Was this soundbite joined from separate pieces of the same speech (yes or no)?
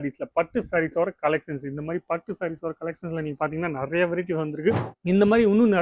yes